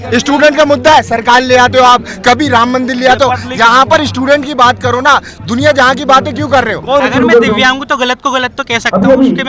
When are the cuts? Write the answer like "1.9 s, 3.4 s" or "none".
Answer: 7.0 s